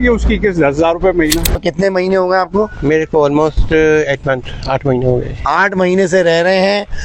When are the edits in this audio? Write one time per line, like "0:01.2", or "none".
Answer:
0:01.6